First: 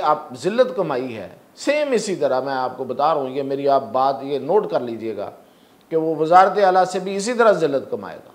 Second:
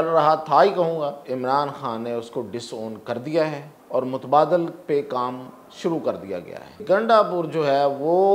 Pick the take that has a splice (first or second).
second